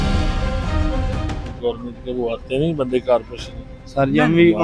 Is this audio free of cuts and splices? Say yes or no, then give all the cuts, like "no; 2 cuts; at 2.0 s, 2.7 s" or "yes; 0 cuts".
no; 1 cut; at 1.5 s